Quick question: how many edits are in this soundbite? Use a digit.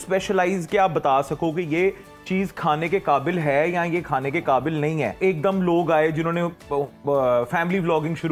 1